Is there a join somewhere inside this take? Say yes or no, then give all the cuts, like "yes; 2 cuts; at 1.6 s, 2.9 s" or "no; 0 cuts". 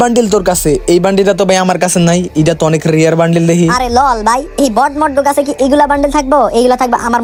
no; 0 cuts